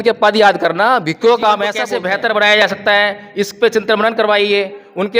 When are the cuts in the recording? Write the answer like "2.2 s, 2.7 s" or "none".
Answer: 1.8 s